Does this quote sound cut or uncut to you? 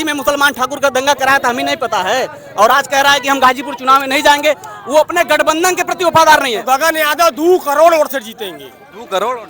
cut